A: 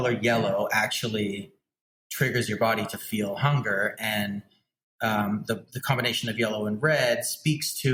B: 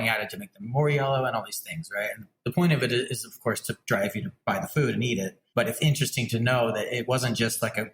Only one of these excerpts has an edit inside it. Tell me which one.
B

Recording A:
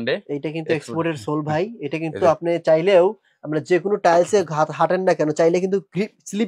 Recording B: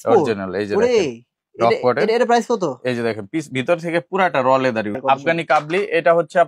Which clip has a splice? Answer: B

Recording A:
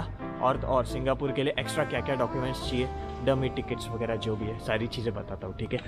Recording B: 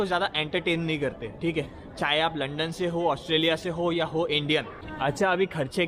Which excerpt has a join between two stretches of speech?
B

